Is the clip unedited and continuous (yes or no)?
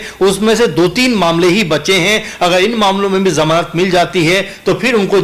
yes